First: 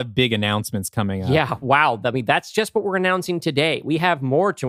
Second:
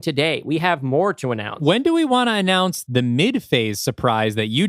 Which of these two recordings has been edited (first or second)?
second